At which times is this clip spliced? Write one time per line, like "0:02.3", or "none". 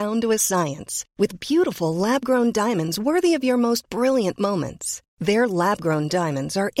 none